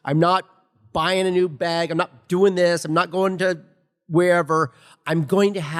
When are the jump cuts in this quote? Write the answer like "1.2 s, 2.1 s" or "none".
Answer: none